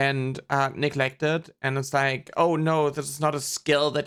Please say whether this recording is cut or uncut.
uncut